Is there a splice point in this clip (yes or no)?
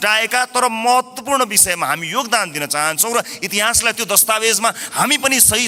no